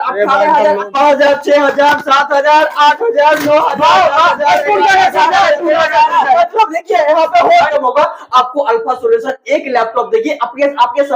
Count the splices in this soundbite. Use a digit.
2